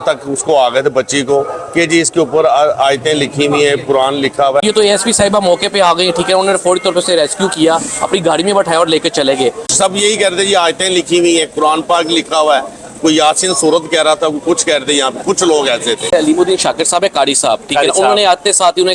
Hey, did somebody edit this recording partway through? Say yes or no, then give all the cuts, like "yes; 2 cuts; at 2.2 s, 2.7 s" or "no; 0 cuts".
yes; 3 cuts; at 4.6 s, 9.7 s, 16.1 s